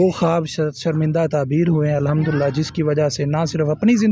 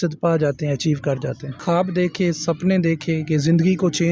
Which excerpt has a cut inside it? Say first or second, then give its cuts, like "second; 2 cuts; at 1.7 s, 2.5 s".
second; 1 cut; at 1.6 s